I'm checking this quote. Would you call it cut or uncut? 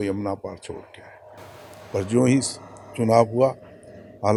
uncut